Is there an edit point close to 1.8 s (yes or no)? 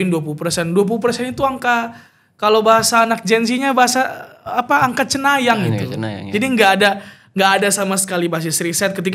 no